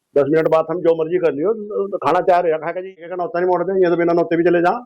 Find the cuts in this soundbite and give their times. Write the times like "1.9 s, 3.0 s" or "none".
3.0 s